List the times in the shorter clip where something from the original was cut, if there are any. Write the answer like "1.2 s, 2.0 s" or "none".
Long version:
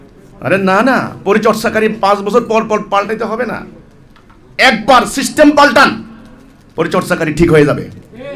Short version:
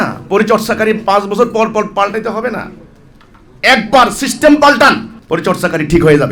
5.1 s